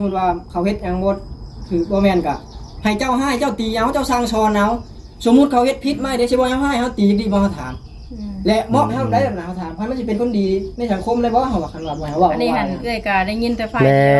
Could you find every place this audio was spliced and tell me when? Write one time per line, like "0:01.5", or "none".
none